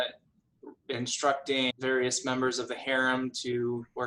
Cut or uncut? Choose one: cut